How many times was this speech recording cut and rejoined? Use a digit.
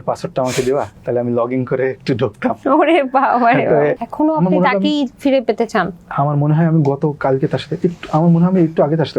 2